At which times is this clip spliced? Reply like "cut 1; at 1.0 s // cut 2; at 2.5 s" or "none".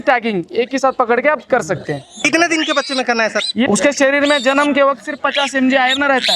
cut 1; at 2.3 s // cut 2; at 3.7 s